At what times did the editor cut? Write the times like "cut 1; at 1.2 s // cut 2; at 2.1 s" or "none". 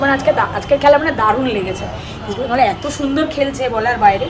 none